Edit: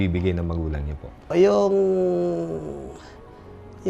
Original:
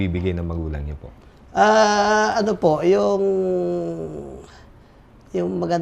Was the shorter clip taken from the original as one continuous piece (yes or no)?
no